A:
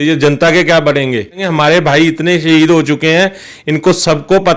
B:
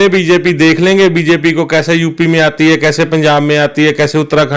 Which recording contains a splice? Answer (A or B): A